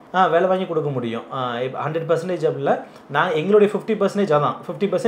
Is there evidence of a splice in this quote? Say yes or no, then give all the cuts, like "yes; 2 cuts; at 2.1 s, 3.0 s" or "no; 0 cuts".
no; 0 cuts